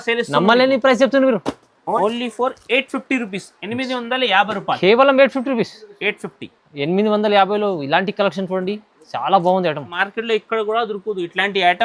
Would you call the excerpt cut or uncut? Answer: cut